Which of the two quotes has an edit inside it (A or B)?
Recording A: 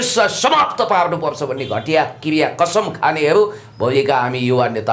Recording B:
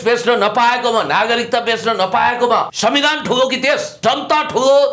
B